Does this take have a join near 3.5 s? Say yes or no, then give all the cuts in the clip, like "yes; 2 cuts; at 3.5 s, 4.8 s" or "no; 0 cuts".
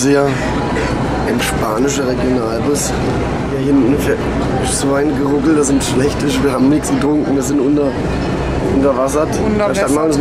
yes; 1 cut; at 3.5 s